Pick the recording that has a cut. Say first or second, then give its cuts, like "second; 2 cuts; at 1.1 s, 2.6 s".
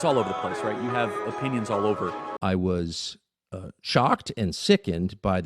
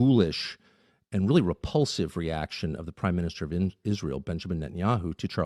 first; 1 cut; at 2.4 s